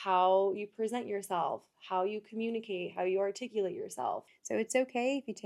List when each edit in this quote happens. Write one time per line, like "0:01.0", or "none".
0:04.3